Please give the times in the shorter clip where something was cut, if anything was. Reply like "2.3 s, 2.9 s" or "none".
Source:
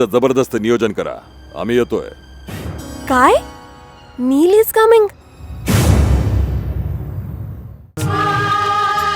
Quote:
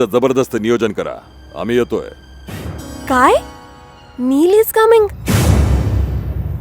5.2 s